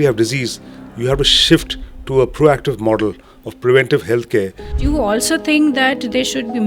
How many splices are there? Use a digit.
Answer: 1